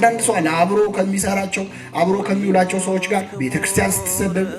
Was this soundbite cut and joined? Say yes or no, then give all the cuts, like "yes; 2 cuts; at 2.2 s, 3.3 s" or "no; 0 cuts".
no; 0 cuts